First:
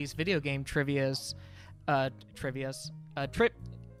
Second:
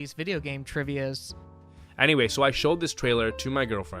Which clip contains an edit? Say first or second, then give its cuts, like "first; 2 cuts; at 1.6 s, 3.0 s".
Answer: second; 1 cut; at 1.8 s